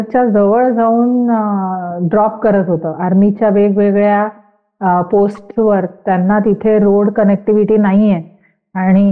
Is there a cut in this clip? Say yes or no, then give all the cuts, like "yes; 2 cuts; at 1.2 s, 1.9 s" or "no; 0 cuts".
no; 0 cuts